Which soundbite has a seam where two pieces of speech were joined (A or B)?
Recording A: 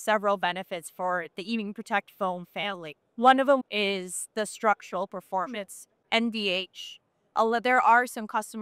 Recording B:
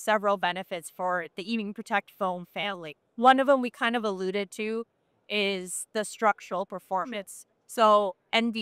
A